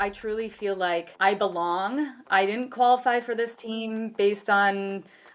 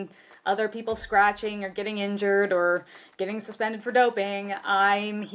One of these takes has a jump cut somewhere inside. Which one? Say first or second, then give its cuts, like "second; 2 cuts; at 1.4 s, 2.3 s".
first; 1 cut; at 1.1 s